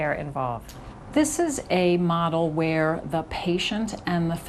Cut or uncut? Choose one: cut